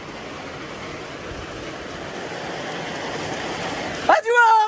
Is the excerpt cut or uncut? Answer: uncut